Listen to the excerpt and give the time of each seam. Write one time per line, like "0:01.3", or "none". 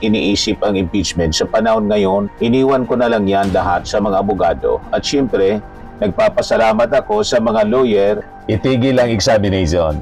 0:08.3